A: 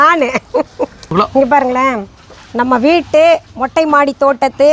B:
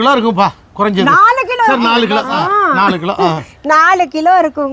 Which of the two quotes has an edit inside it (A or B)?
A